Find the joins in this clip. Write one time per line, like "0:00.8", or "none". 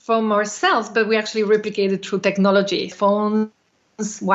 0:02.9